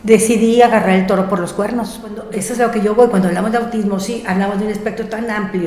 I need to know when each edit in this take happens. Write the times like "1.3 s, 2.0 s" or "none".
2.3 s